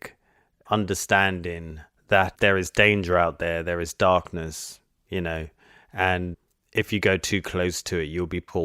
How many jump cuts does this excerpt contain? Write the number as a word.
two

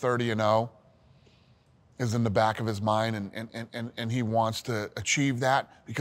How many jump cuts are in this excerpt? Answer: zero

